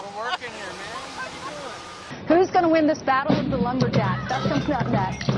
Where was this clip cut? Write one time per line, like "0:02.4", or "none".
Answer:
0:01.4